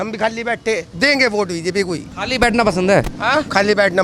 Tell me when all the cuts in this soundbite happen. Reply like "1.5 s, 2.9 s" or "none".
none